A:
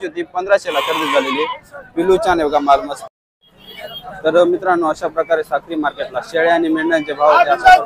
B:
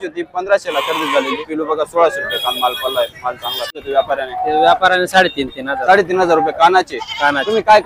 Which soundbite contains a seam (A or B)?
B